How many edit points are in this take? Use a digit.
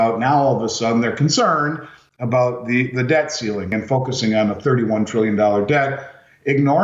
1